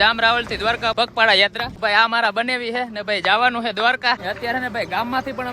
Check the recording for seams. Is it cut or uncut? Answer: cut